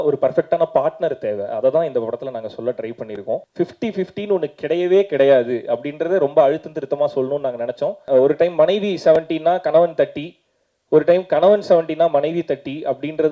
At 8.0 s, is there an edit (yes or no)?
yes